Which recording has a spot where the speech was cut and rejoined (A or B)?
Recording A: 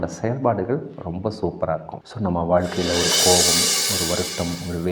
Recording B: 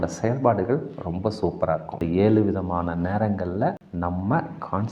B